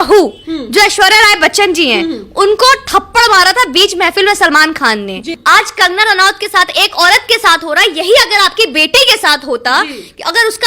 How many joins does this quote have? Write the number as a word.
one